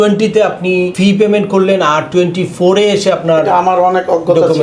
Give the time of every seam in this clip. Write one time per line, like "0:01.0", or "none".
0:00.9